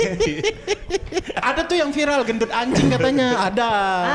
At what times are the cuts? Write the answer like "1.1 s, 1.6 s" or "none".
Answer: 1.3 s